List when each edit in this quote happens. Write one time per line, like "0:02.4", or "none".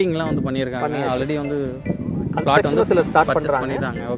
none

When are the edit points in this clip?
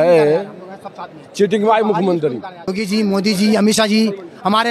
0:02.8

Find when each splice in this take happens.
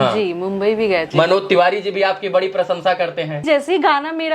0:01.1
0:03.4

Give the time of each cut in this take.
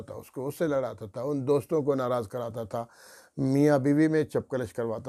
none

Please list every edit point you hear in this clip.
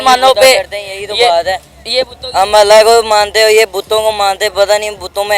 none

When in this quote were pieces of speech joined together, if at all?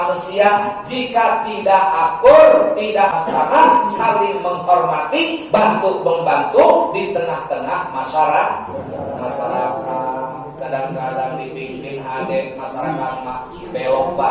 none

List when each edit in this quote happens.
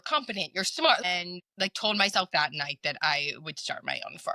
0:01.0

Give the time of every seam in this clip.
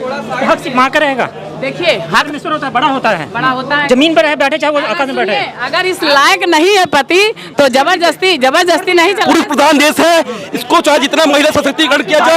0:02.2
0:09.2

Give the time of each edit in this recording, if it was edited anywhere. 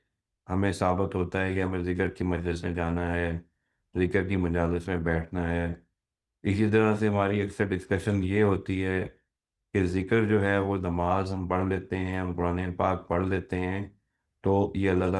none

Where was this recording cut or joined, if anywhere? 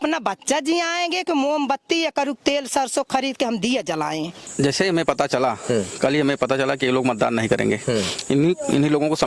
0:04.4

